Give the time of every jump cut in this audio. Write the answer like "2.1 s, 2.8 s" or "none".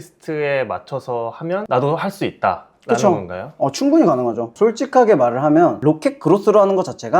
1.6 s, 4.5 s